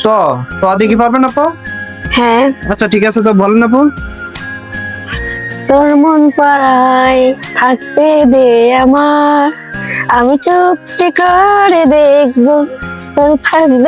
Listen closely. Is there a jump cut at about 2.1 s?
yes; 1 cut; at 2.1 s

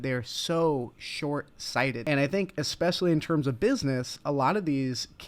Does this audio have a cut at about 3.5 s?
no; 1 cut; at 2.0 s

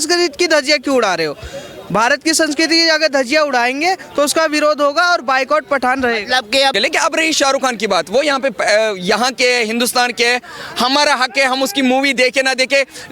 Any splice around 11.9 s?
no; 1 cut; at 6.8 s

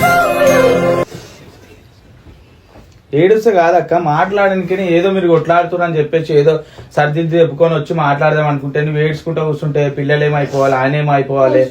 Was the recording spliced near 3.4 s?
no; 1 cut; at 1.1 s

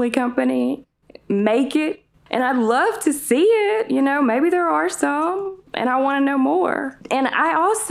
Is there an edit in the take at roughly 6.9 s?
yes; 2 cuts; at 2.1 s, 6.9 s

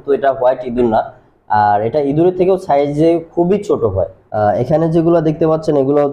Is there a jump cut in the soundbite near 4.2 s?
yes; 1 cut; at 4.2 s

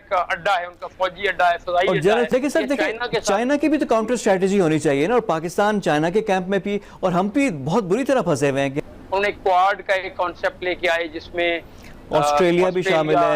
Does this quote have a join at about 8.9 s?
yes; 2 cuts; at 2.3 s, 8.9 s

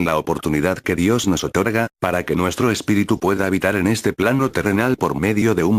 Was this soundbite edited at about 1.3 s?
no; 1 cut; at 2.5 s

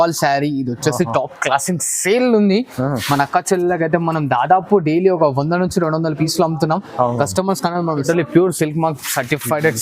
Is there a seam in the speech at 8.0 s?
yes; 1 cut; at 8.0 s

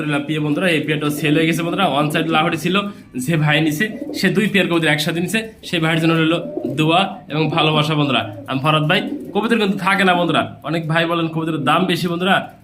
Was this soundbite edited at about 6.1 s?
no; 0 cuts

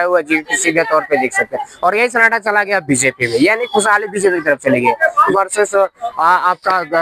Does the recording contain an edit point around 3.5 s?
no; 1 cut; at 5.2 s

